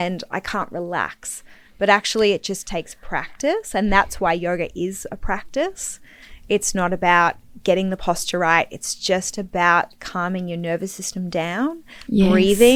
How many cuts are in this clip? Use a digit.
0